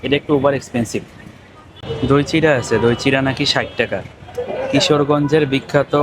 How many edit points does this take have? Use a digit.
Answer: 1